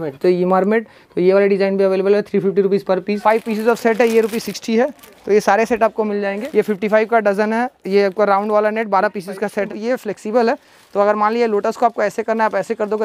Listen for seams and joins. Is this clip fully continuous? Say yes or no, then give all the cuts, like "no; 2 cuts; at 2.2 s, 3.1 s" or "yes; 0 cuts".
no; 3 cuts; at 3.1 s, 6.4 s, 9.7 s